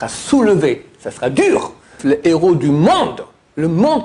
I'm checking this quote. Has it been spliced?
yes; 1 cut; at 2.0 s

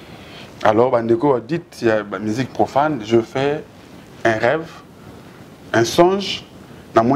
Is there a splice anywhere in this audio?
no; 0 cuts

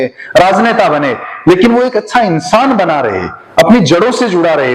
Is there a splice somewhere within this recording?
no; 0 cuts

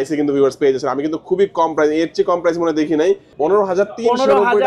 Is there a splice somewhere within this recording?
yes; 1 cut; at 3.3 s

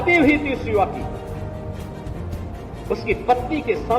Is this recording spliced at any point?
yes; 2 cuts; at 1.0 s, 2.8 s

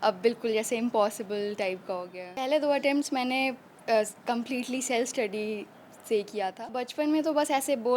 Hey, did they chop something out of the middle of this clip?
yes; 2 cuts; at 2.4 s, 6.7 s

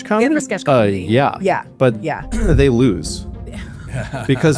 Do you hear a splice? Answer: no; 0 cuts

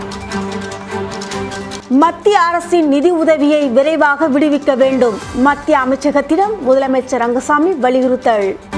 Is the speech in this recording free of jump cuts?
yes; 0 cuts

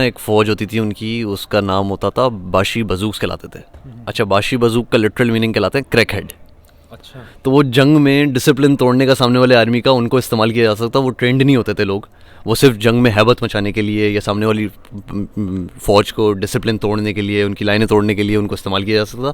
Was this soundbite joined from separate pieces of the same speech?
no; 0 cuts

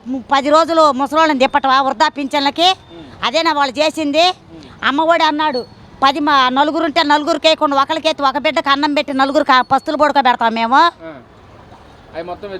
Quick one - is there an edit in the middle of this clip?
no; 0 cuts

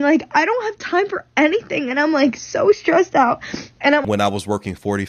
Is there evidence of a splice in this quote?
yes; 1 cut; at 4.0 s

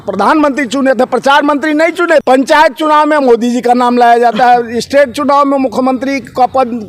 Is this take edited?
yes; 1 cut; at 2.2 s

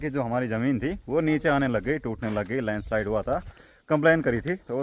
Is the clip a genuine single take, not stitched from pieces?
no; 1 cut; at 3.6 s

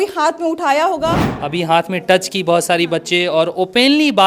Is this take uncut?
no; 1 cut; at 1.3 s

